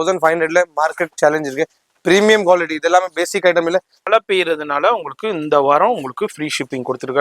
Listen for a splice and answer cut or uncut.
cut